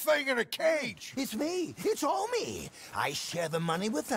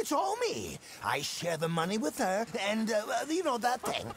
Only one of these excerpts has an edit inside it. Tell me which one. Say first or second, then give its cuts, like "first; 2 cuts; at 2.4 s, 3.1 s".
first; 1 cut; at 1.0 s